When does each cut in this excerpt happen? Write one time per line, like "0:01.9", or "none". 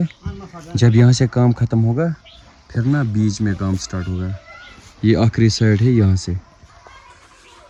none